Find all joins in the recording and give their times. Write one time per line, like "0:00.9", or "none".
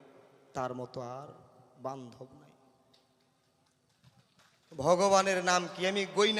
none